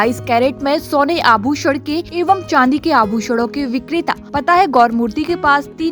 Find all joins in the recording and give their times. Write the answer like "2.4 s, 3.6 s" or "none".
2.1 s, 4.2 s